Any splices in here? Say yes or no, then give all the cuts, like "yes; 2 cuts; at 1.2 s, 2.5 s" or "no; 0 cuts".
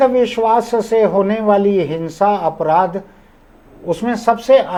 no; 0 cuts